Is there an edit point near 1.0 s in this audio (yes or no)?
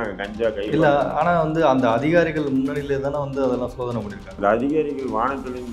no